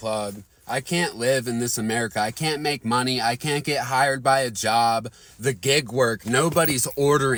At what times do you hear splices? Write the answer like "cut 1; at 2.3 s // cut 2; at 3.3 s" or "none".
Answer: none

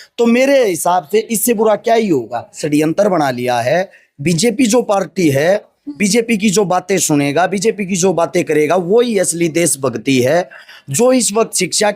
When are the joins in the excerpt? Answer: cut 1; at 2.6 s

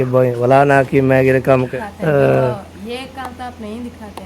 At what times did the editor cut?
cut 1; at 1.7 s

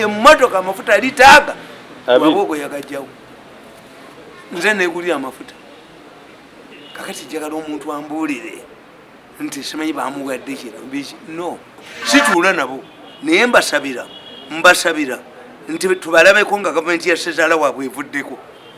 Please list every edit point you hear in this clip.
cut 1; at 11.9 s

